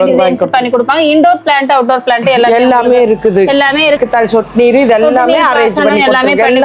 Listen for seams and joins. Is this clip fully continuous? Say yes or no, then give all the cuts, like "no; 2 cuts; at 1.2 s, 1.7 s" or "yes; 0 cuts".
no; 1 cut; at 4.0 s